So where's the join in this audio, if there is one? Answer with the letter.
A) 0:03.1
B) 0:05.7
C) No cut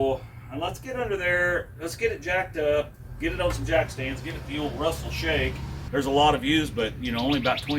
B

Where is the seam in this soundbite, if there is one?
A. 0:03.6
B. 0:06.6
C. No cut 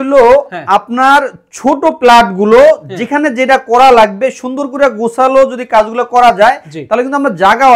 C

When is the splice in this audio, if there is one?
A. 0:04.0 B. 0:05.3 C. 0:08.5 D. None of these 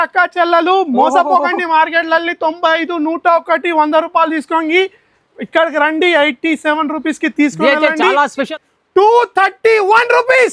C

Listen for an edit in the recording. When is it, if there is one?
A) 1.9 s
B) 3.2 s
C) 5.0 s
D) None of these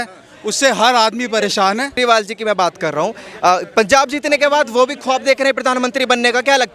A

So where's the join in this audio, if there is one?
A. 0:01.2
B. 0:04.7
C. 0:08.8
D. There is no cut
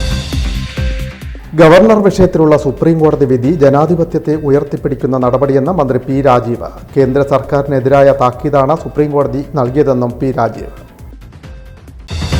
A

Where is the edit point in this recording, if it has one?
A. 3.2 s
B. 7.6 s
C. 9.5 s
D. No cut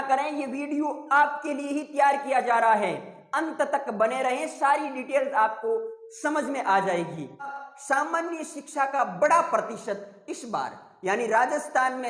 B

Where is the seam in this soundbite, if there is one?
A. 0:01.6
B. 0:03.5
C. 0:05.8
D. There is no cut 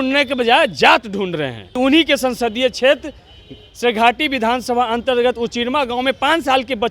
A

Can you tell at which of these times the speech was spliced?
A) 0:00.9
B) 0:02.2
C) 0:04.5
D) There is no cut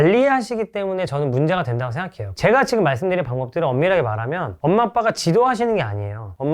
B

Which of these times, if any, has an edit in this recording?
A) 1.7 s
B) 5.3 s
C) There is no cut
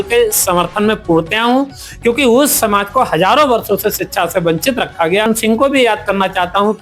B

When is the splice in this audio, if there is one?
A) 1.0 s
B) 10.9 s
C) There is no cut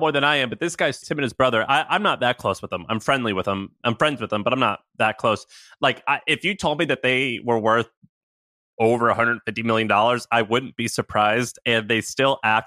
A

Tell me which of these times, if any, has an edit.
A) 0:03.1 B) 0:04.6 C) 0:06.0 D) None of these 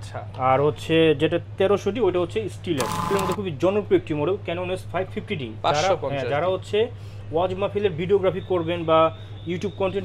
A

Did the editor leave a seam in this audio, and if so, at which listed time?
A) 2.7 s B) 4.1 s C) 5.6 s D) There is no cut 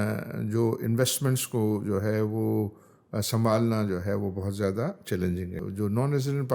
C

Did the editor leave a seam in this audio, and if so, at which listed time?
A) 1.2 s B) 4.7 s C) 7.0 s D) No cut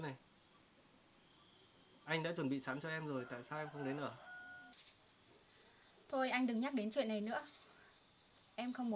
B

